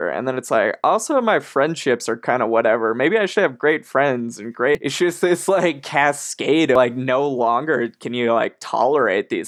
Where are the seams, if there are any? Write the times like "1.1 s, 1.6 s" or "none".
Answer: 4.8 s, 6.8 s

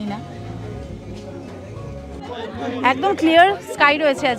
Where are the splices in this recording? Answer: 2.2 s

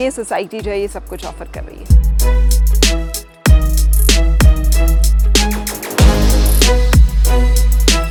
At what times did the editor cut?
none

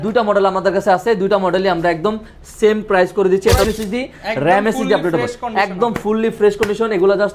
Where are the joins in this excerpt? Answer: 3.6 s

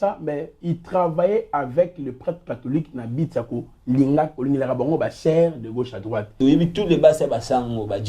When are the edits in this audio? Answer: 6.3 s

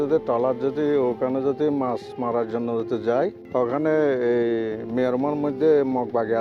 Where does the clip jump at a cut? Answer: 3.4 s

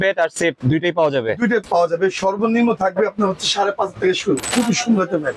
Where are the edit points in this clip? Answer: 1.6 s, 4.5 s

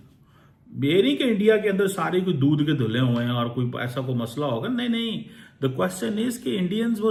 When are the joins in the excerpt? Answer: none

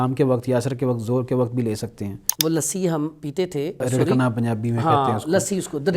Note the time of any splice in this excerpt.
2.2 s, 3.8 s

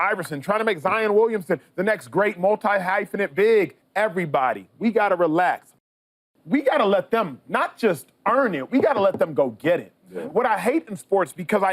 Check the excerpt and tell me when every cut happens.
3.8 s, 5.7 s

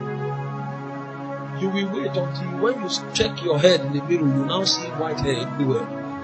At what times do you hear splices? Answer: none

